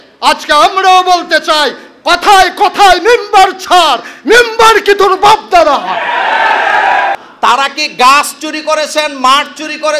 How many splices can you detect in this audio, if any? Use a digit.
1